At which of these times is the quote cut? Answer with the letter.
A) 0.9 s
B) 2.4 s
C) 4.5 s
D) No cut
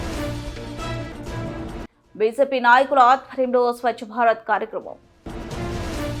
D